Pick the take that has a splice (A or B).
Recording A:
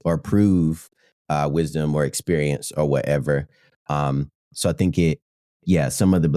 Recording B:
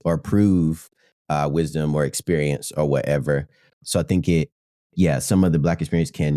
B